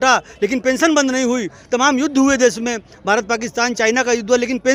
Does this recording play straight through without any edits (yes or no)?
yes